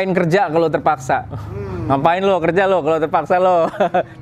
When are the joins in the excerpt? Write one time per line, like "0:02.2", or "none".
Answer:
none